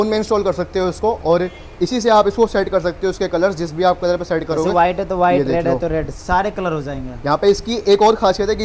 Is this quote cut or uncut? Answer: uncut